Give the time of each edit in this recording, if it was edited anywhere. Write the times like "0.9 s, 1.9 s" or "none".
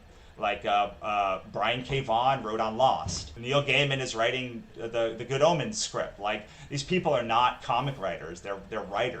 3.4 s, 4.7 s